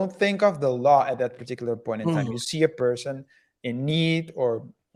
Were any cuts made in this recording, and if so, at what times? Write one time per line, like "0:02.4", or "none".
none